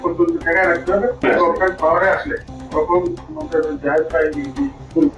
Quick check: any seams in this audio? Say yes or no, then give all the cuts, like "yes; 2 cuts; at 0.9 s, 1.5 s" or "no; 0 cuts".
no; 0 cuts